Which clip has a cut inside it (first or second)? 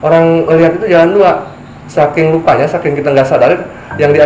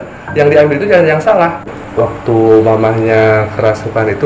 second